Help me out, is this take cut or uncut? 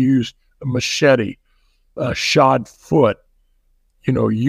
uncut